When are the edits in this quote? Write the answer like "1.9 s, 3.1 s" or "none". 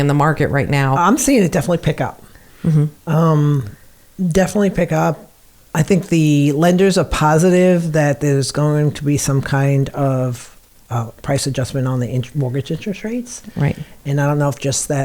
1.0 s

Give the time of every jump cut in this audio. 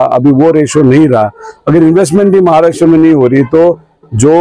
none

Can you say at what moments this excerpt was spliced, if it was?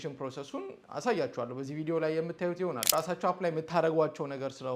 2.9 s

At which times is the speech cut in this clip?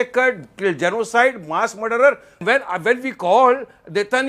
2.4 s

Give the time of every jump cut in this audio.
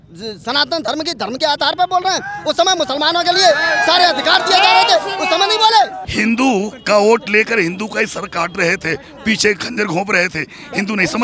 6.0 s

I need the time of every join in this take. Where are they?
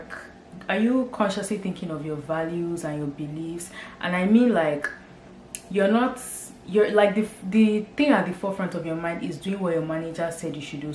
none

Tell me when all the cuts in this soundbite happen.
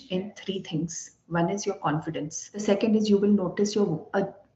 2.6 s

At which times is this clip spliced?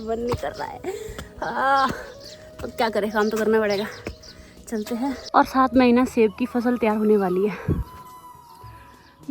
none

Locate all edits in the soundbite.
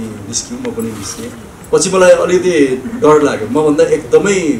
1.5 s

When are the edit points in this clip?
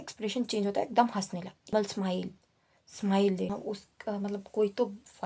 1.7 s, 3.5 s

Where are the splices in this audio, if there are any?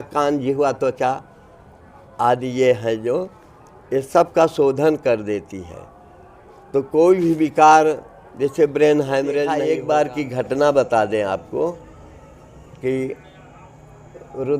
9.6 s

